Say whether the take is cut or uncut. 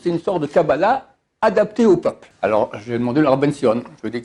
cut